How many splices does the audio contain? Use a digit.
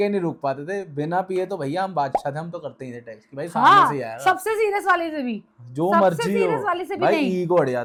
0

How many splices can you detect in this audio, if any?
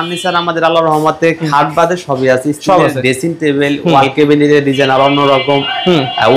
0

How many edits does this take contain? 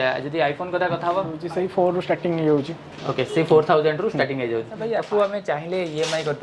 2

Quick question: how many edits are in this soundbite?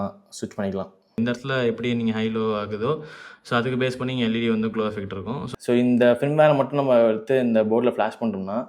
2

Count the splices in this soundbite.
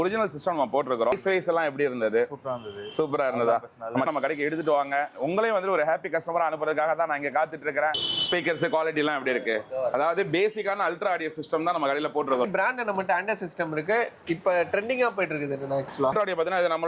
5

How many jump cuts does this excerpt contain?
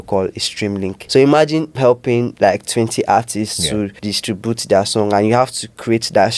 3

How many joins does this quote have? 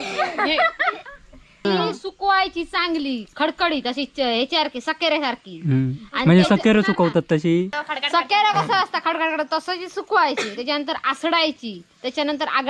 2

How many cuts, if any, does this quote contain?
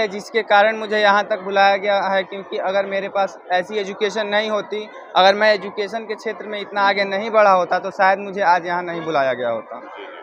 0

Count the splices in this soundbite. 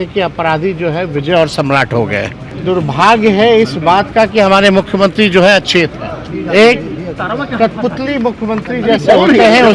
2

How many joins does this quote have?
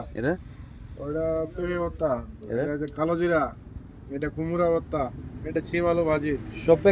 0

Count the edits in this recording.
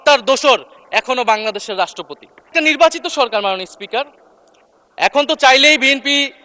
1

